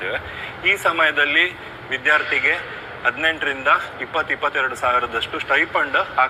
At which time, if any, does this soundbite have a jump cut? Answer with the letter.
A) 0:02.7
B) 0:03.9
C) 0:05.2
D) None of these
D